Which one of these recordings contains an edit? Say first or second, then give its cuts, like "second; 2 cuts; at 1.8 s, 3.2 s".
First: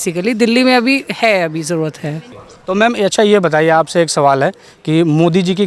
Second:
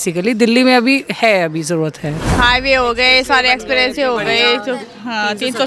second; 1 cut; at 2.3 s